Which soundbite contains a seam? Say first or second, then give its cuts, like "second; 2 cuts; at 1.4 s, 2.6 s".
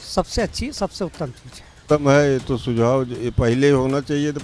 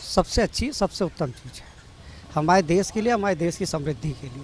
first; 1 cut; at 1.8 s